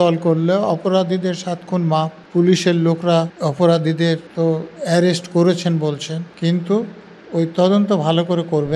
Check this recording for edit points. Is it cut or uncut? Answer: cut